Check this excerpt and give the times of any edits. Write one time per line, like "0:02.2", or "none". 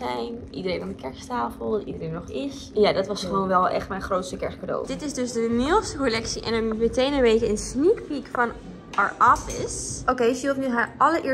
0:02.7
0:04.9
0:09.9